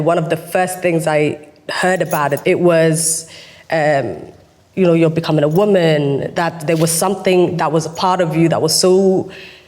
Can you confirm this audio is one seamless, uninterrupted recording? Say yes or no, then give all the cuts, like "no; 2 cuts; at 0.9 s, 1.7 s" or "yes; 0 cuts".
no; 1 cut; at 2.4 s